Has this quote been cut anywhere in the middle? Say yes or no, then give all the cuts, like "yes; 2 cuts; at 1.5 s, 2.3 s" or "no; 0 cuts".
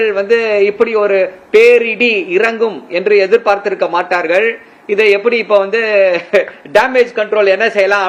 no; 0 cuts